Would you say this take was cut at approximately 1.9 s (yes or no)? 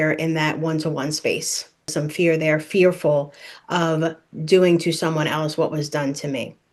yes